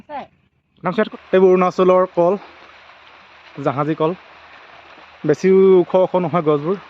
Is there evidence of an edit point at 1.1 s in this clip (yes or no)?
yes